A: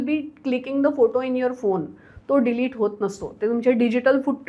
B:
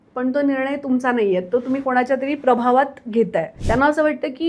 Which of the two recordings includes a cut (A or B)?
B